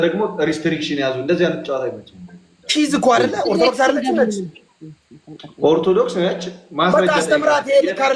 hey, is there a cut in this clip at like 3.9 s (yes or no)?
no